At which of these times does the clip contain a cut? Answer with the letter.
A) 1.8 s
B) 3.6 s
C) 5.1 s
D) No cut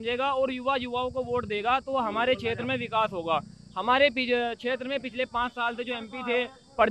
D